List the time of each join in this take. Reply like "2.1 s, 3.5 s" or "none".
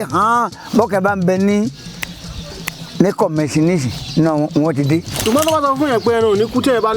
5.1 s